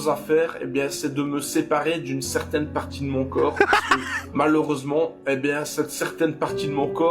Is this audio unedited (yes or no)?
no